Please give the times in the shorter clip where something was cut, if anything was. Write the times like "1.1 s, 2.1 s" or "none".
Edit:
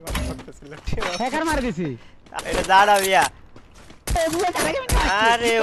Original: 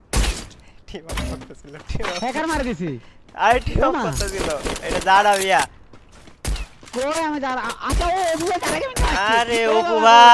2.3 s, 4.2 s